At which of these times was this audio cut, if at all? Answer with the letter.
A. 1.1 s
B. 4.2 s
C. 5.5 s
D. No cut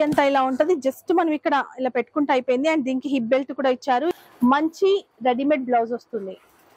B